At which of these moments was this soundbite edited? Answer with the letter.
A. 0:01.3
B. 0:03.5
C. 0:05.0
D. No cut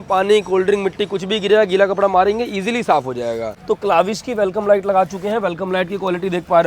B